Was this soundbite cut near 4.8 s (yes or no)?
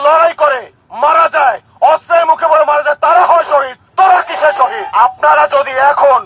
yes